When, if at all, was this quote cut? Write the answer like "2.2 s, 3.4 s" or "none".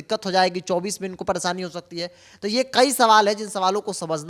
none